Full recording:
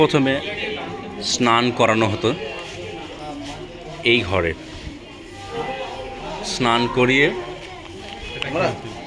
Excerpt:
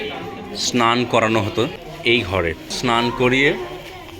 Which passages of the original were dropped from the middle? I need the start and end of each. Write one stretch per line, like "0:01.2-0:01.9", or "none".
0:02.4-0:03.8
0:04.7-0:06.5